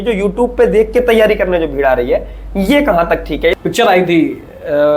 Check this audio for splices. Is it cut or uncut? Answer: cut